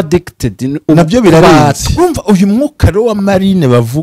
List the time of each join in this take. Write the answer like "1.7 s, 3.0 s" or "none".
2.0 s

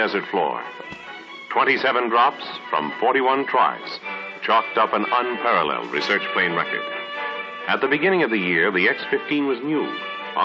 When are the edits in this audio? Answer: none

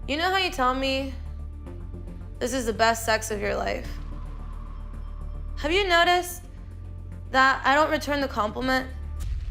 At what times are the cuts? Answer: none

